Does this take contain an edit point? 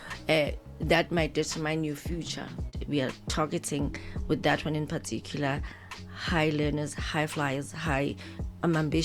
yes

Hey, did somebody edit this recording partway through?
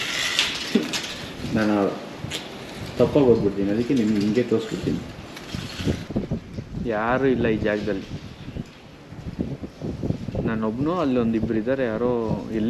yes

